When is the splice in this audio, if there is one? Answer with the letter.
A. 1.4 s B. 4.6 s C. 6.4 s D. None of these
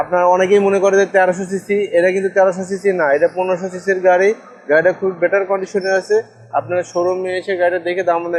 D